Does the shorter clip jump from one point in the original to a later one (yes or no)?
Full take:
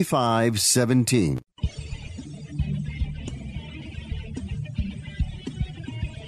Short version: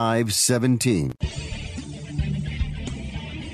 yes